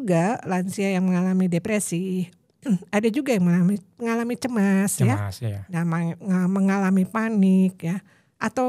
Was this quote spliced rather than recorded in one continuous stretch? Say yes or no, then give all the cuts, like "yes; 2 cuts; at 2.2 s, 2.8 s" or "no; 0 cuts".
no; 0 cuts